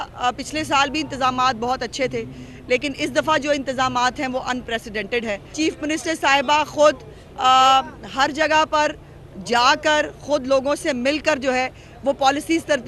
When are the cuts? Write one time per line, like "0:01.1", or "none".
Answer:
0:05.5